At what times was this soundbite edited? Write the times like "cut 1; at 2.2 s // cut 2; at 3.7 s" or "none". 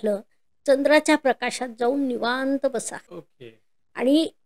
none